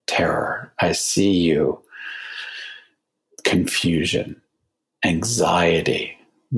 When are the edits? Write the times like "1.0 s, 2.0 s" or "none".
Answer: 5.1 s